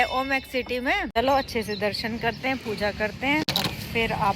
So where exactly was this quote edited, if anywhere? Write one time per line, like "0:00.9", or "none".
0:01.2